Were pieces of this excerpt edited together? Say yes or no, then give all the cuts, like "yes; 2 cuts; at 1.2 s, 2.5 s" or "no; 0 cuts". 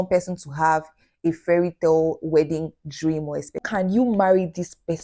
yes; 1 cut; at 3.5 s